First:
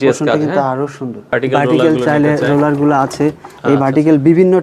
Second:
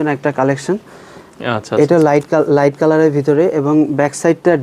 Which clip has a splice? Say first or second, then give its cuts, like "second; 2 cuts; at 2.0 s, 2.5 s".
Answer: first; 1 cut; at 1.3 s